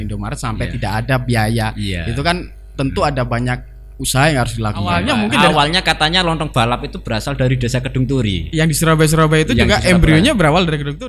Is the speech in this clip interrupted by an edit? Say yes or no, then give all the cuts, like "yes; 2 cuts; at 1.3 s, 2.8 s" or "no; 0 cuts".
yes; 1 cut; at 4.9 s